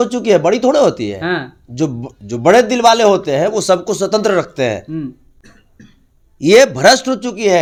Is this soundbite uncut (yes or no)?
yes